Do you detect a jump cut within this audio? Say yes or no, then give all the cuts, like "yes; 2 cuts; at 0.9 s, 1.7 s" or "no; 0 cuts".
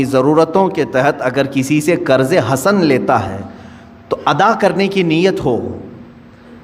no; 0 cuts